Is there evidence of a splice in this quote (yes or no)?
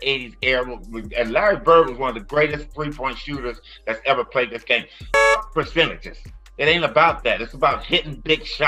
no